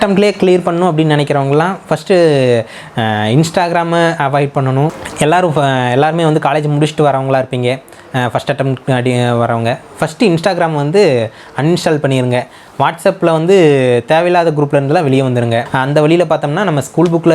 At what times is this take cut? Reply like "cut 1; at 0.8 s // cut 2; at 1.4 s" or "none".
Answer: cut 1; at 5.0 s // cut 2; at 15.7 s